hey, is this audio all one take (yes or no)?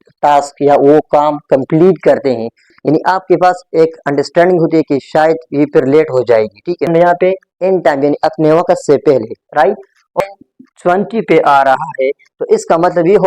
no